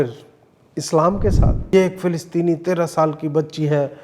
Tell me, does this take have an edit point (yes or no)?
yes